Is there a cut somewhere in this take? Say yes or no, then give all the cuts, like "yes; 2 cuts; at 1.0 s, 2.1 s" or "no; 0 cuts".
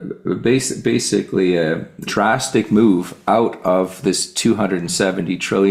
yes; 1 cut; at 2.1 s